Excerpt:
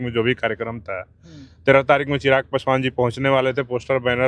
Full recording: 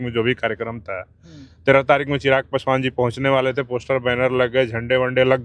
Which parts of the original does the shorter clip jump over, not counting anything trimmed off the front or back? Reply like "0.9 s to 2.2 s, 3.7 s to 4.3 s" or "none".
none